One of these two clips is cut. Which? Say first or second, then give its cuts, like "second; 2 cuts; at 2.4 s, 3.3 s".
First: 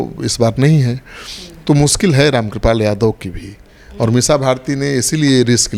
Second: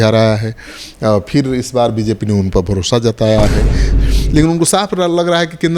second; 1 cut; at 3.8 s